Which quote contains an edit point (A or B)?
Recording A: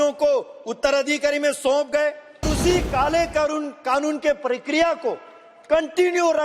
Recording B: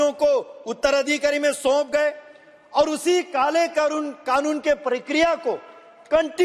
A